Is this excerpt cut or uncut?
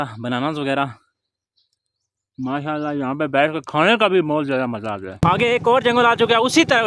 cut